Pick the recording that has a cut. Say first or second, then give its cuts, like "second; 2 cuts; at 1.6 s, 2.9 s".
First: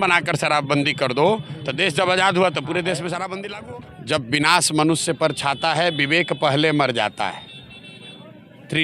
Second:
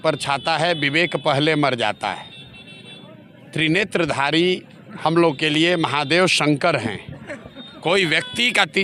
first; 1 cut; at 3.5 s